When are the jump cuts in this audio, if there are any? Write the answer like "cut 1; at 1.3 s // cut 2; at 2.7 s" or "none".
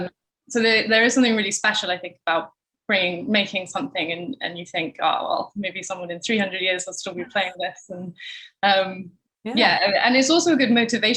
none